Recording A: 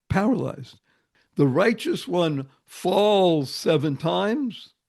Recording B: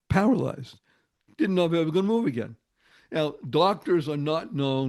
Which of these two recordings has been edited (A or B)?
A